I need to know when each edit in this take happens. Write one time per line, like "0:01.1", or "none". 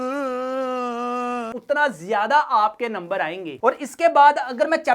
0:01.5
0:03.4